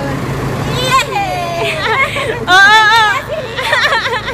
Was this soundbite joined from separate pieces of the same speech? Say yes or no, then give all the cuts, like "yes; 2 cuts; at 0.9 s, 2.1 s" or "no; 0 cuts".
yes; 1 cut; at 1.8 s